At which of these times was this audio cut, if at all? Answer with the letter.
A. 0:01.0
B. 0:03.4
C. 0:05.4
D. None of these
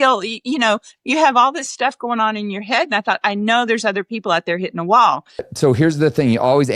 C